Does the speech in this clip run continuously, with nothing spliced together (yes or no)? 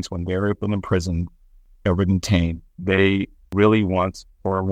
no